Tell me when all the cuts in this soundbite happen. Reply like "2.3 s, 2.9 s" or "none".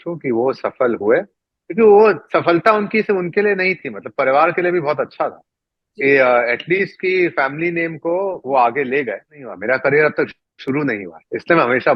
9.5 s